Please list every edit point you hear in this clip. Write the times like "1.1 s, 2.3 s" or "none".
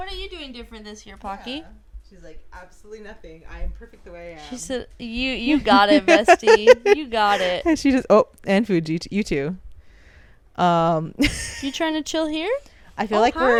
none